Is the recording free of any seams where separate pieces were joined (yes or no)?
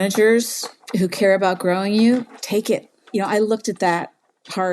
no